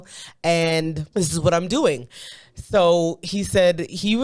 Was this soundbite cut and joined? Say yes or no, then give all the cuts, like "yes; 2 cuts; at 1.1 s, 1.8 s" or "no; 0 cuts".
yes; 1 cut; at 1.0 s